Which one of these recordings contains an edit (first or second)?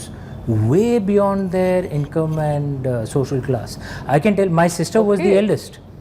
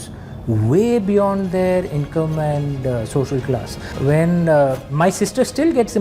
second